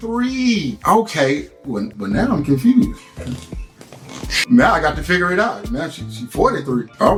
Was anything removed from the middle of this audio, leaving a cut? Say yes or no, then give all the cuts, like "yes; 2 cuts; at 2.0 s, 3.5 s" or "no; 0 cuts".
no; 0 cuts